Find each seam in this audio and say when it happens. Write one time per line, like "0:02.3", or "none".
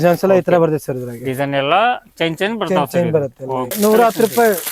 0:03.7

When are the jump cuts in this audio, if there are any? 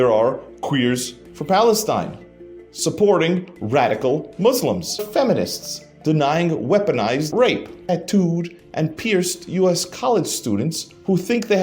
0:05.1
0:07.7

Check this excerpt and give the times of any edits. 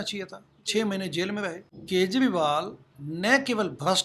0:01.7

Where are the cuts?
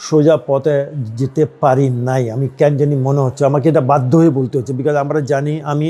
none

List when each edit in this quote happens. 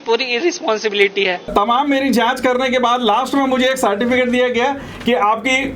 0:01.5

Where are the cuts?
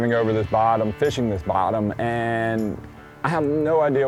none

